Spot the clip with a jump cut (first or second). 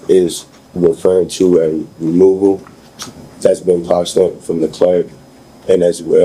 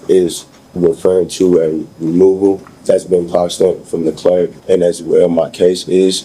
second